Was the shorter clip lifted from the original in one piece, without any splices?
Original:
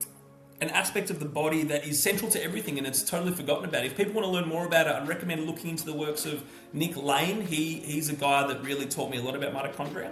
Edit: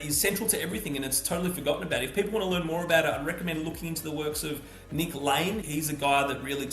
no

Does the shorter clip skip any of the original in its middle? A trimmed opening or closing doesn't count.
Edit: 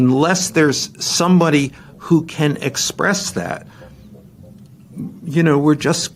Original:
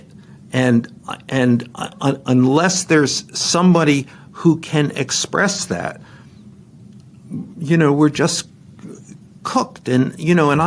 no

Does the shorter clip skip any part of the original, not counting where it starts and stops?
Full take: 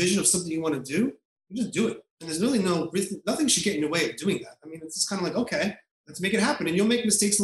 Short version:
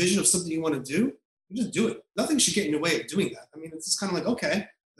yes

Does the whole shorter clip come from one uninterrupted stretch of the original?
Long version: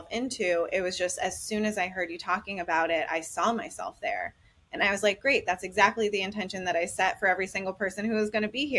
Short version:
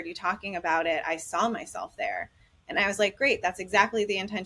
yes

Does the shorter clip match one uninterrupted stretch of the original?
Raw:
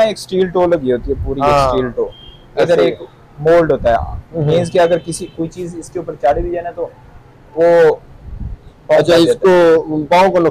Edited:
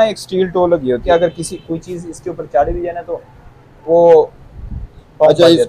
no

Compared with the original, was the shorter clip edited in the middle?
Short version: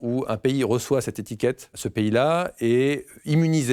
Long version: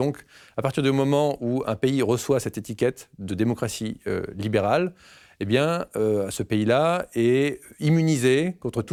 yes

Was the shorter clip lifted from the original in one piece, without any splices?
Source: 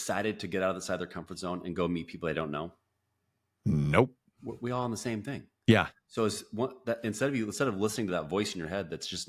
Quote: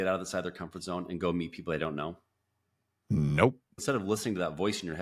no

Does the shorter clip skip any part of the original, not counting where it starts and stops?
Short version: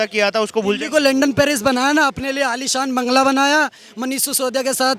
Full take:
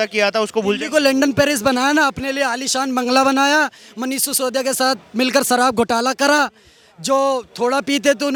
no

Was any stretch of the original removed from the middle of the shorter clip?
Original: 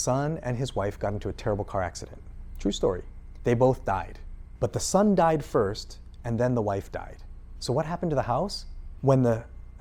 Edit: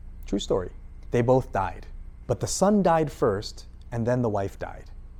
no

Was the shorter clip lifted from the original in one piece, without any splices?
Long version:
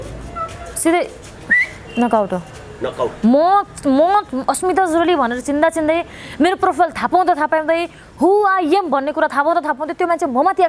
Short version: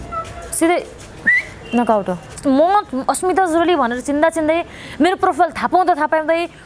no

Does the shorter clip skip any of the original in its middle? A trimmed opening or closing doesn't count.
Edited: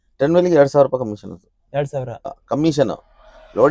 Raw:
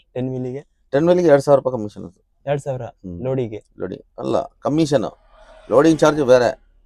yes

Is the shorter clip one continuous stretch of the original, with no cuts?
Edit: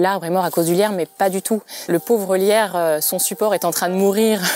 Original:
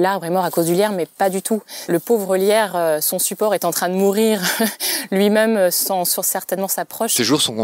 yes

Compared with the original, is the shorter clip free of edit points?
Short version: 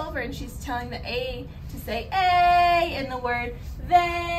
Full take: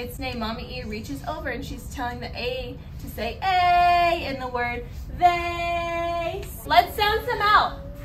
yes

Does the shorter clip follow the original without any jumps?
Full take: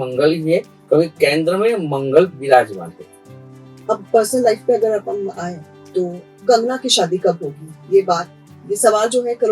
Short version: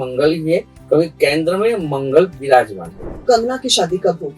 no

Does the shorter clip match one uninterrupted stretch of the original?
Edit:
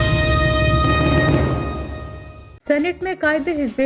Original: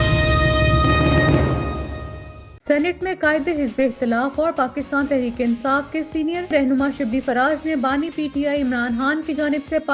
yes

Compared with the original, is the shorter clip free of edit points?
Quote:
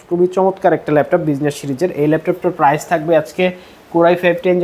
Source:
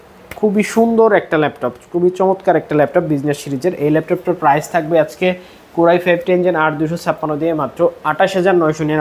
yes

